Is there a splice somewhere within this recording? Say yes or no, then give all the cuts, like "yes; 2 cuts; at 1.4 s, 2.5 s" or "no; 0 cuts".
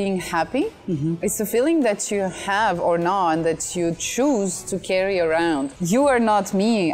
yes; 1 cut; at 5.7 s